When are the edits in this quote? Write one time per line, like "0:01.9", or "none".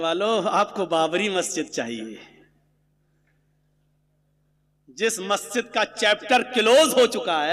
none